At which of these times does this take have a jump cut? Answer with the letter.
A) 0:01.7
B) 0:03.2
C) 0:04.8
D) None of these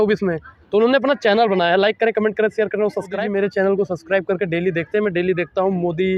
B